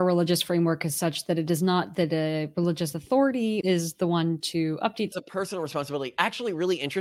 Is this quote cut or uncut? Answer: cut